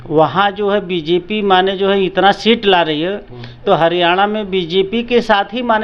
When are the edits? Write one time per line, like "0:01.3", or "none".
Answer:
none